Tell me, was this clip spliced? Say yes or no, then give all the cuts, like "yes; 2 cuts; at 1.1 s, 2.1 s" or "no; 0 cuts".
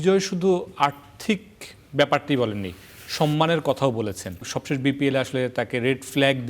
yes; 1 cut; at 4.4 s